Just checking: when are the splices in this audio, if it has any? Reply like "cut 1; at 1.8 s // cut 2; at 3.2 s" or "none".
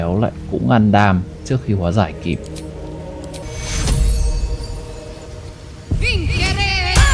cut 1; at 3.4 s // cut 2; at 5.3 s